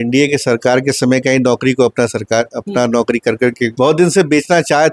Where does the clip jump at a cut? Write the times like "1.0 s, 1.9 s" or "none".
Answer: 3.7 s